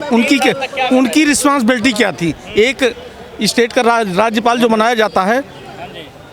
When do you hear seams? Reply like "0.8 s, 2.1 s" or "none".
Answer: none